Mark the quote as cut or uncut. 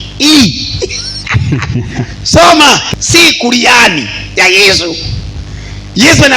cut